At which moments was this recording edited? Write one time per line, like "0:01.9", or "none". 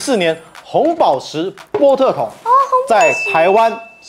none

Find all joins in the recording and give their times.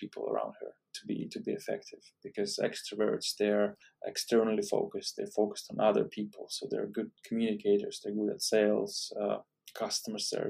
none

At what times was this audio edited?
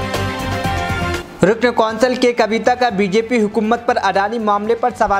0:01.1

